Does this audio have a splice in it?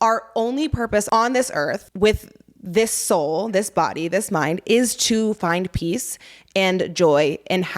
yes; 2 cuts; at 1.1 s, 1.9 s

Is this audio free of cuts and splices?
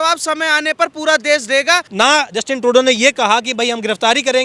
no; 1 cut; at 1.9 s

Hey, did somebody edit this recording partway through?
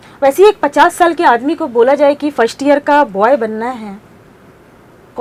no; 0 cuts

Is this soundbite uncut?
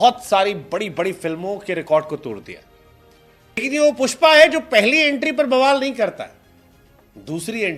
no; 1 cut; at 3.6 s

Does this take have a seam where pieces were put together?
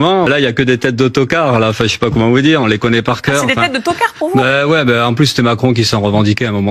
no; 0 cuts

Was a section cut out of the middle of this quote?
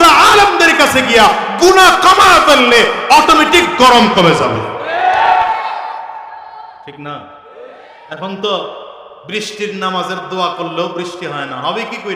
no; 0 cuts

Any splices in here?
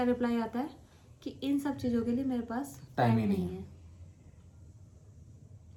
no; 0 cuts

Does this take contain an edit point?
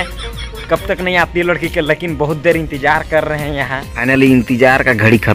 yes; 1 cut; at 3.8 s

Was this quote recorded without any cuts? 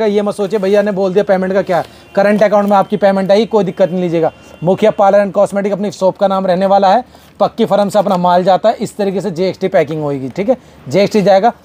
yes; 0 cuts

